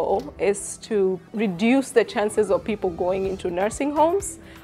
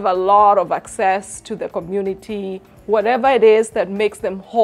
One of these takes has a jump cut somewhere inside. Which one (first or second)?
first